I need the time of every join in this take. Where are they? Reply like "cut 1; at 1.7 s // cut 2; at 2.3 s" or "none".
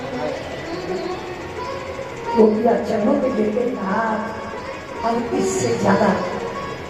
cut 1; at 3.8 s